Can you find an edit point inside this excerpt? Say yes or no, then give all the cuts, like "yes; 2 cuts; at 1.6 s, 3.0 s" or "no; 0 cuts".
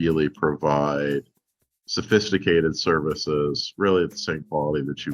no; 0 cuts